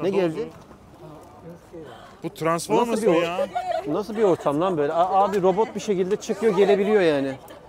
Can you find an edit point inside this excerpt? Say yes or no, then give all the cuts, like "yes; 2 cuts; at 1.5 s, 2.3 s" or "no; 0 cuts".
no; 0 cuts